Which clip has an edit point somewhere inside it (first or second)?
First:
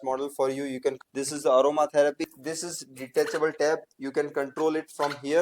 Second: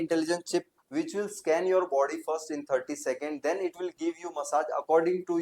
first